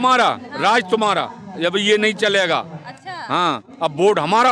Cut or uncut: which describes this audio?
uncut